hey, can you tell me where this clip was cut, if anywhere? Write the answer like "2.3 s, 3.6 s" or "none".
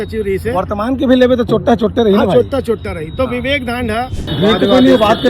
4.2 s